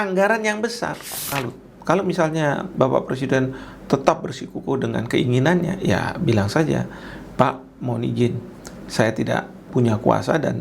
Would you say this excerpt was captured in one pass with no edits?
no; 2 cuts; at 1.3 s, 9.7 s

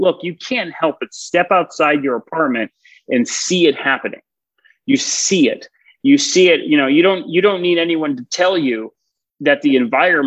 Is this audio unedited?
yes; 0 cuts

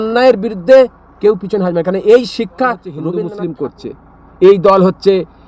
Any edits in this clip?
yes; 1 cut; at 3.0 s

